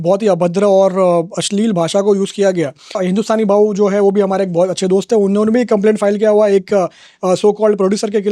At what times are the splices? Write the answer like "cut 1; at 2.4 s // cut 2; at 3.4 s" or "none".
cut 1; at 3.0 s